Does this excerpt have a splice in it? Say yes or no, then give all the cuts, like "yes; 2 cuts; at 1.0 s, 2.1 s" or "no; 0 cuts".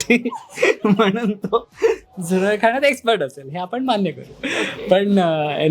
no; 0 cuts